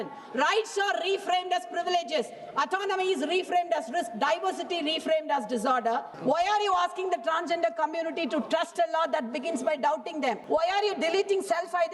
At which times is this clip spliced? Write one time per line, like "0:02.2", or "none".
0:06.1
0:10.4